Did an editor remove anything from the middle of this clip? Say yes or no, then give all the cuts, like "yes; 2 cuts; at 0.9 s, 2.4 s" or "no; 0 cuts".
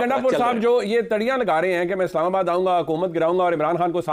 no; 0 cuts